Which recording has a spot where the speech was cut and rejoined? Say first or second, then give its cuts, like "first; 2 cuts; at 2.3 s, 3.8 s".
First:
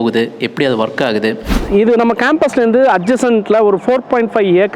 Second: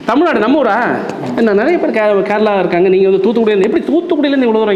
first; 1 cut; at 1.5 s